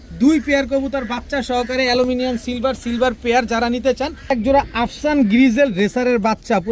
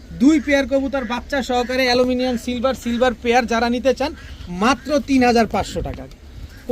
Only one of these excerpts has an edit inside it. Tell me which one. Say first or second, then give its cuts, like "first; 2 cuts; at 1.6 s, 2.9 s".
first; 1 cut; at 4.3 s